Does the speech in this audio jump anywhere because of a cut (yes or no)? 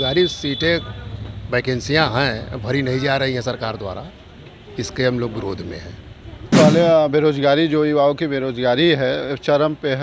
yes